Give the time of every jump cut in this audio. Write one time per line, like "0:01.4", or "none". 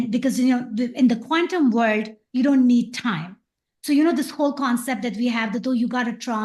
none